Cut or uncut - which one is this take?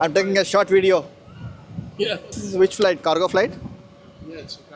uncut